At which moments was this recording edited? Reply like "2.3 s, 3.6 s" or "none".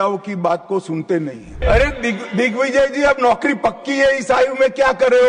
1.6 s